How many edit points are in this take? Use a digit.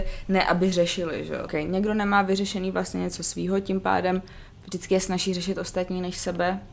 1